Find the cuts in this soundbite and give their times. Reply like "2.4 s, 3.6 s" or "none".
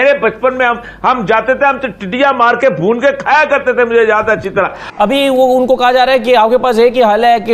4.8 s